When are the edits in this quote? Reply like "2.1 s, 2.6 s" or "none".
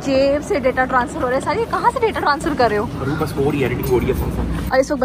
none